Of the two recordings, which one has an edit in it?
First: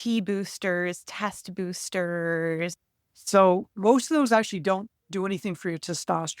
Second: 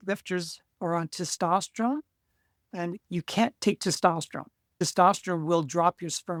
first; 2 cuts; at 2.8 s, 3.7 s

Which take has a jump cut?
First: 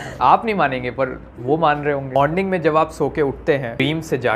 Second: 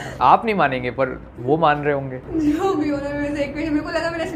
first; 1 cut; at 2.2 s

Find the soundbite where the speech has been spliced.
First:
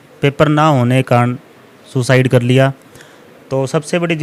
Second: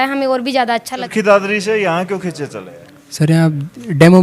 second; 1 cut; at 1.0 s

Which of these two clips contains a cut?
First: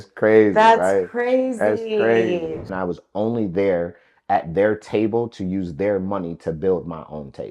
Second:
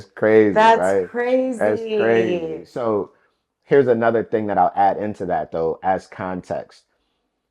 first; 1 cut; at 2.7 s

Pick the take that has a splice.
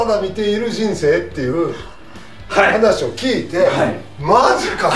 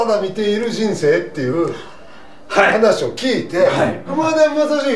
second; 1 cut; at 4.1 s

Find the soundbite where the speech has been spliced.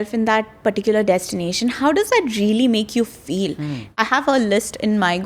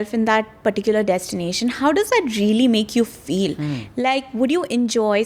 first; 1 cut; at 4.0 s

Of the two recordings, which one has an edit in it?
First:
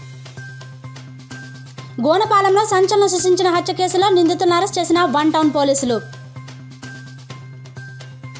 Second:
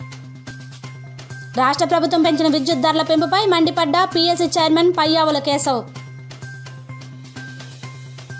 second; 2 cuts; at 1.5 s, 5.9 s

